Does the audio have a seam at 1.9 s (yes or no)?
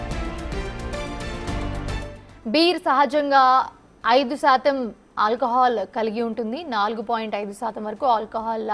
yes